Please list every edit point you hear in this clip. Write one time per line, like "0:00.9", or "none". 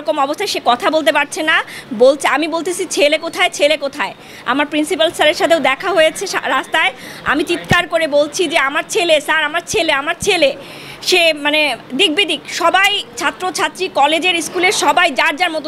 none